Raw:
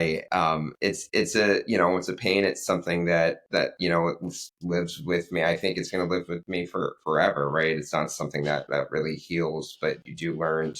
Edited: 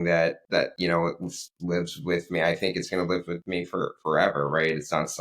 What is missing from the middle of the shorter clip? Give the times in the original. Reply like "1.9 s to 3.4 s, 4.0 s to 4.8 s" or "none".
none